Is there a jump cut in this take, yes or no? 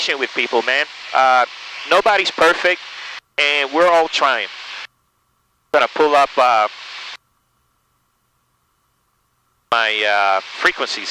no